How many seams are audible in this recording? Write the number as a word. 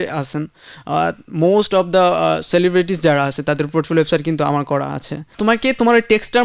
one